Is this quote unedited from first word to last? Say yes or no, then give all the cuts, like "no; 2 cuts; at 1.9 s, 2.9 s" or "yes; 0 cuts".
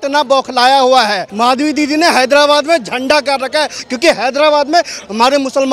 no; 2 cuts; at 1.2 s, 3.8 s